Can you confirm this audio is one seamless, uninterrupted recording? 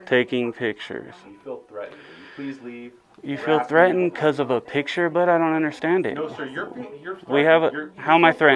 yes; 0 cuts

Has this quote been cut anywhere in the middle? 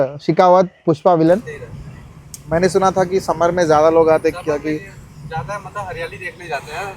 yes; 1 cut; at 1.9 s

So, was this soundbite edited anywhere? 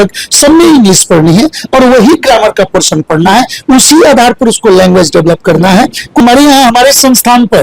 yes; 1 cut; at 6.2 s

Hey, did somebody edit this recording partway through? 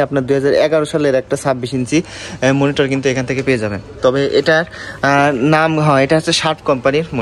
no; 0 cuts

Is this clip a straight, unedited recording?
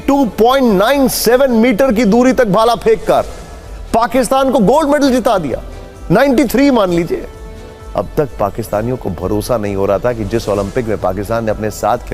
yes; 0 cuts

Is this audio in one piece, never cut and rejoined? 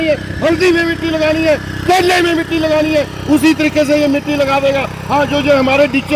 yes; 0 cuts

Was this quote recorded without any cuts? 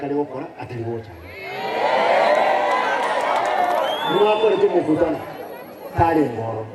yes; 0 cuts

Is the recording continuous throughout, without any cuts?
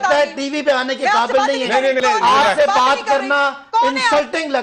no; 1 cut; at 2.0 s

